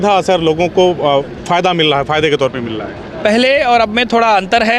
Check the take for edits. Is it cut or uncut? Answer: uncut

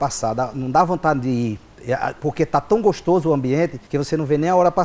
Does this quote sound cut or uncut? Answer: cut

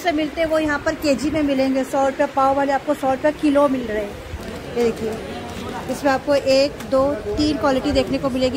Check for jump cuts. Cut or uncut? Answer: cut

